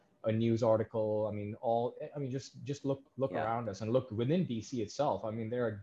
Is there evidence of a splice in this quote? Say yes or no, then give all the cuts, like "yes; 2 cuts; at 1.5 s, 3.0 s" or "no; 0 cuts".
yes; 1 cut; at 3.1 s